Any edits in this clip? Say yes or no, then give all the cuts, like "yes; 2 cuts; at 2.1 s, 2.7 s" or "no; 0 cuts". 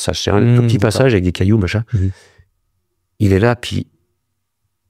no; 0 cuts